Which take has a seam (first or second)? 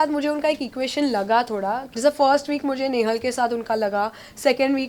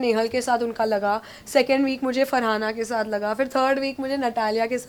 first